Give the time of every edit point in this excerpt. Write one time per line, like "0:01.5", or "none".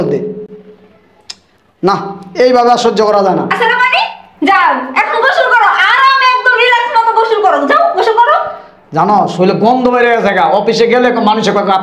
none